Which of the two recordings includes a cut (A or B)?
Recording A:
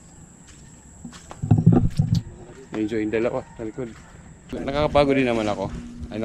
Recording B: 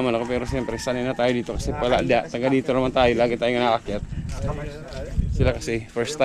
A